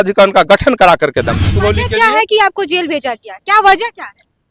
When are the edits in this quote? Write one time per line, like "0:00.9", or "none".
0:01.5